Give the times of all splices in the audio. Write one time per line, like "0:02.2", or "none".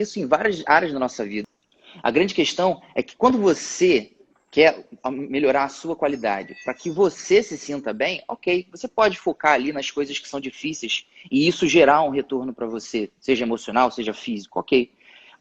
0:01.4